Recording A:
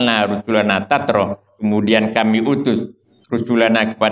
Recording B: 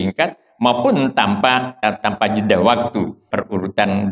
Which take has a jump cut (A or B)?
B